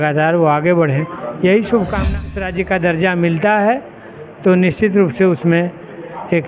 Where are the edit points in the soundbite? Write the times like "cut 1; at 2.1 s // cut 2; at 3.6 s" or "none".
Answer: cut 1; at 2.3 s